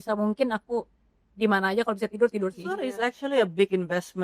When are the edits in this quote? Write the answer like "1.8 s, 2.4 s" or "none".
2.9 s

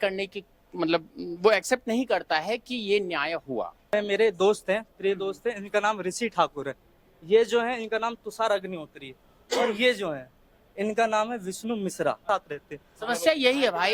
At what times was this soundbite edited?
3.9 s, 12.2 s

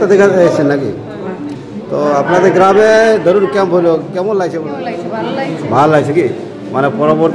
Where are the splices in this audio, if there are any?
4.6 s

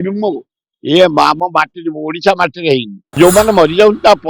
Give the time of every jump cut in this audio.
3.2 s

